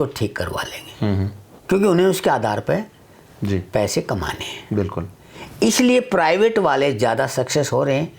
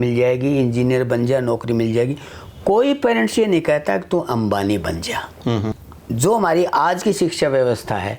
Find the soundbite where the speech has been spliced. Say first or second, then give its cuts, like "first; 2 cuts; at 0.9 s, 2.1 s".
second; 1 cut; at 5.9 s